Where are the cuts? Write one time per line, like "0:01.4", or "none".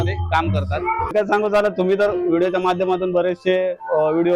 0:01.1